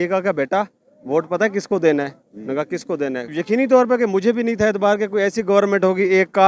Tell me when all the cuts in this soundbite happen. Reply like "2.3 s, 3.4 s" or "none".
3.3 s